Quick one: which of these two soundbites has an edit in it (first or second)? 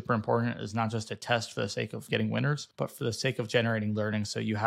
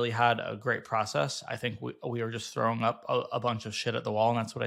first